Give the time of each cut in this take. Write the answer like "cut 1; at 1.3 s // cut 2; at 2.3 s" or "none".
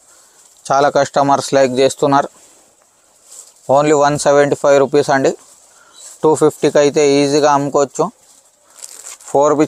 none